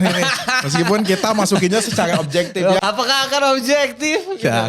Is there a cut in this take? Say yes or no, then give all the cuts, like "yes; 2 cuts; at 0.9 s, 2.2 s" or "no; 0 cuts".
yes; 1 cut; at 2.8 s